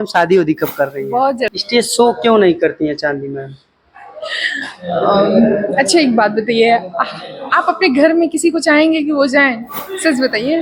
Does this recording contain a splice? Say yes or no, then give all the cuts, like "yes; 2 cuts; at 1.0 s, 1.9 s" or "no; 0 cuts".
yes; 1 cut; at 1.5 s